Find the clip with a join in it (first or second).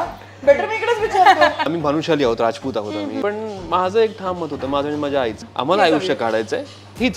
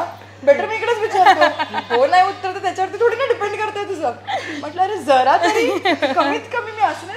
first